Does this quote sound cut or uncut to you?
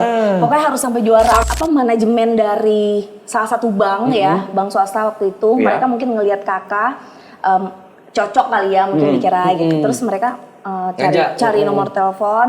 cut